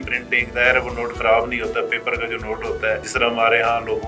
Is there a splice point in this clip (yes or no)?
yes